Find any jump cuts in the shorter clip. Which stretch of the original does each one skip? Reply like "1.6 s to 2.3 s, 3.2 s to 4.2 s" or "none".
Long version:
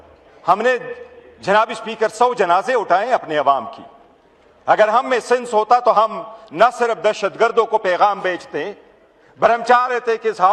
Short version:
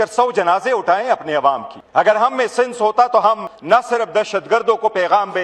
3.8 s to 4.5 s, 6.2 s to 6.4 s